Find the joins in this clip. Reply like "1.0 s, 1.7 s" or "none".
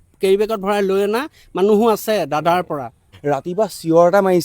3.1 s